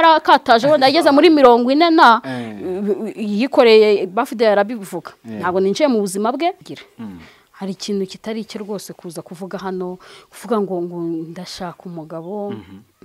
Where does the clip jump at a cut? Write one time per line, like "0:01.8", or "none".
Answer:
0:06.6